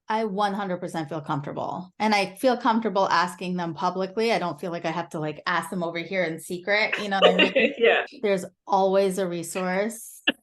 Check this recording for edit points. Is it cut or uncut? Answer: cut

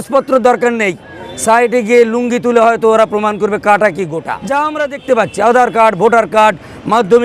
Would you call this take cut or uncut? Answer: cut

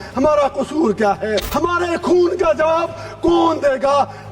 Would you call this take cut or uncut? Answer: cut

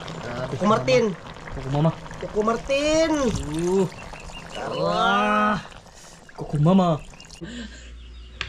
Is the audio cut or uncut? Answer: cut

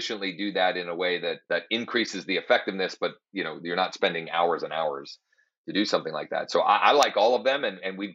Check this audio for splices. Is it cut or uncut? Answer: cut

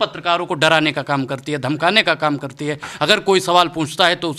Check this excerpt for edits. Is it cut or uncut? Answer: uncut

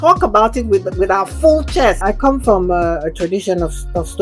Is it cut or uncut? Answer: cut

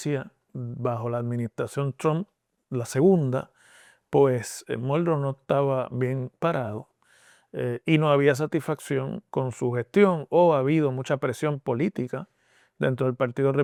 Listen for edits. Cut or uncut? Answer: uncut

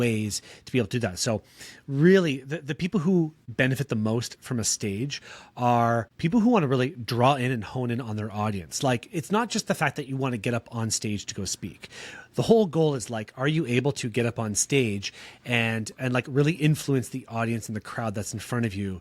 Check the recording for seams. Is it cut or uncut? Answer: cut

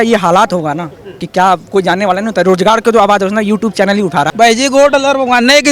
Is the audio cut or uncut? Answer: cut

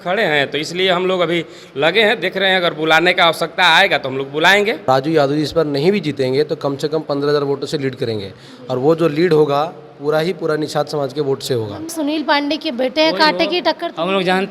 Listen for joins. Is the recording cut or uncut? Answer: cut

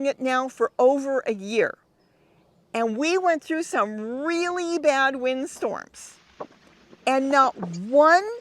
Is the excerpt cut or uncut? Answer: uncut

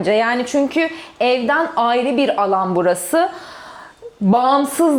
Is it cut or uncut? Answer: uncut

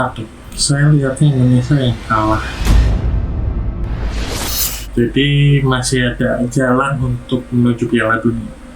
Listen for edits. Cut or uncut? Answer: cut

